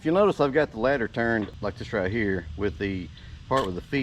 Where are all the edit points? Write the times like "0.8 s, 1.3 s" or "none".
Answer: 1.5 s